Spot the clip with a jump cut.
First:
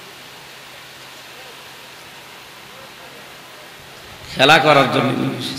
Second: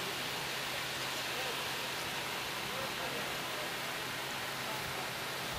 first; 1 cut; at 3.8 s

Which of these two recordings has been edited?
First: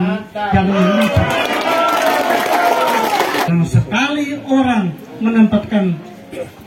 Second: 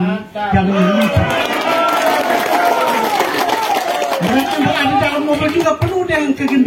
first; 1 cut; at 3.5 s

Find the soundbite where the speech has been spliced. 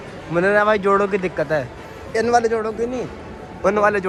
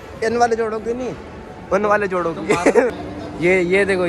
second; 1 cut; at 3.1 s

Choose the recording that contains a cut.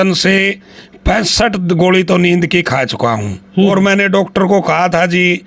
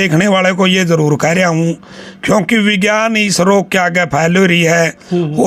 first; 1 cut; at 3.7 s

